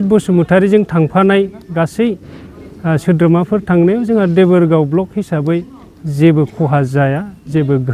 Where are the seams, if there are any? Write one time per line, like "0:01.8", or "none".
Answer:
none